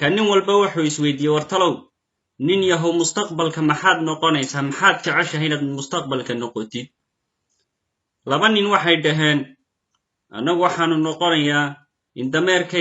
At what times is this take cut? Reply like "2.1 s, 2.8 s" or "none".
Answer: 2.5 s